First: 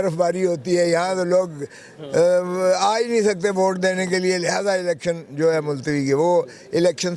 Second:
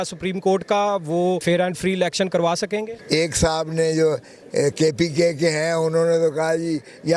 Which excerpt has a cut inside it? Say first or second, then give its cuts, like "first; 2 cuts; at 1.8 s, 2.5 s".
second; 2 cuts; at 1.4 s, 2.9 s